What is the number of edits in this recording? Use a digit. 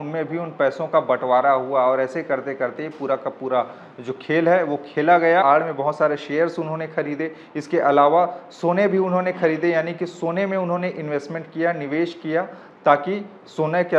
1